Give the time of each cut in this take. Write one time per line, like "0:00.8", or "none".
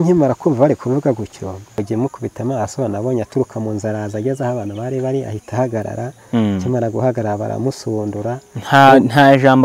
0:01.8

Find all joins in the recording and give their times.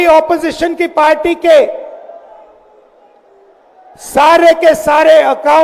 none

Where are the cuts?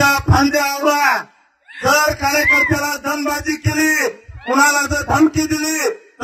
none

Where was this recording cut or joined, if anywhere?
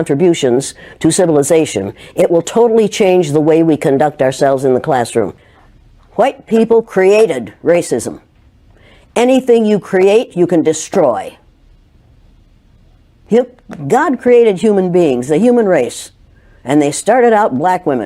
0:05.4

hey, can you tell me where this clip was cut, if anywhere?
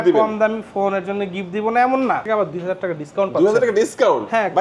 0:02.2

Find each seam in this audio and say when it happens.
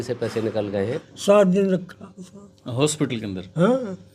0:01.0

